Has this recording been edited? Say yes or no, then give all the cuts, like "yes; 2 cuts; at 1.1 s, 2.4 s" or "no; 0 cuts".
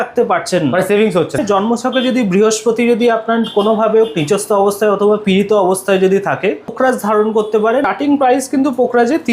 yes; 3 cuts; at 1.4 s, 6.7 s, 7.9 s